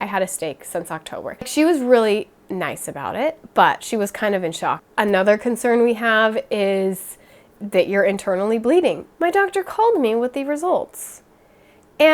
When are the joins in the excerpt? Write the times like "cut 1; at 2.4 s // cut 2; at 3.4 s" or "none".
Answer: cut 1; at 1.5 s // cut 2; at 4.9 s // cut 3; at 9.1 s